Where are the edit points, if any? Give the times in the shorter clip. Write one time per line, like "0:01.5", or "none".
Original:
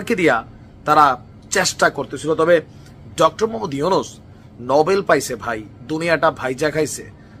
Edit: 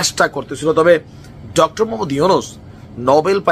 none